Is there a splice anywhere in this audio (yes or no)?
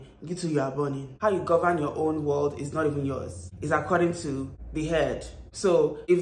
yes